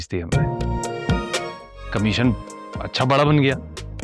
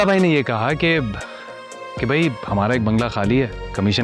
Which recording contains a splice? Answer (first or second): first